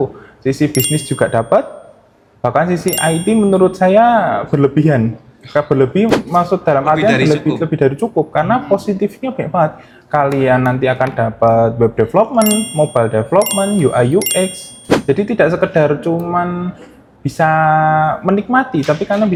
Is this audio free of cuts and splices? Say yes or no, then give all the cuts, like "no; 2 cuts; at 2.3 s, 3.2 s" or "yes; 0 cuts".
yes; 0 cuts